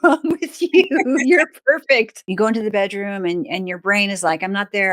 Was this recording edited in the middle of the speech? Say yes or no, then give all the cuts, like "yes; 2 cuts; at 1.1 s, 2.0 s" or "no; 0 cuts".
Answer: yes; 1 cut; at 2.2 s